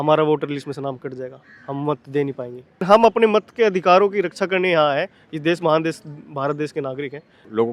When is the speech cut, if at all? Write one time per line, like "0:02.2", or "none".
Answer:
0:02.8